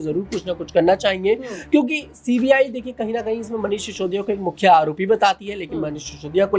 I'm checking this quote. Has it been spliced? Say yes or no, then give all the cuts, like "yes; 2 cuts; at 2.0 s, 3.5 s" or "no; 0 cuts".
no; 0 cuts